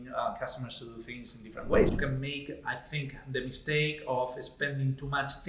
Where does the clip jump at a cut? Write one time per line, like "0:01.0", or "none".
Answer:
0:01.9